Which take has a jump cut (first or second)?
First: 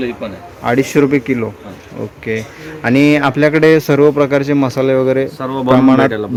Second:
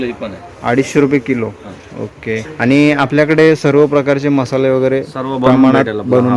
second